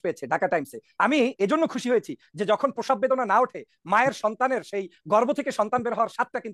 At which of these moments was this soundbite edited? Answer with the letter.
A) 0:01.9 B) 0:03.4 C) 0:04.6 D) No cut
D